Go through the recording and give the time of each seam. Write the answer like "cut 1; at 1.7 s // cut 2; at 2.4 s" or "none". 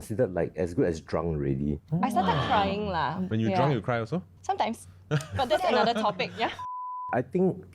cut 1; at 1.8 s // cut 2; at 3.2 s // cut 3; at 6.6 s